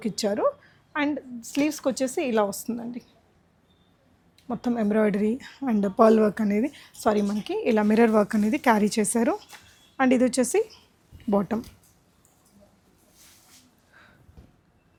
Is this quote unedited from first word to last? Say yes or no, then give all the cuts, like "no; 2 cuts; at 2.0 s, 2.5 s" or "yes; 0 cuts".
yes; 0 cuts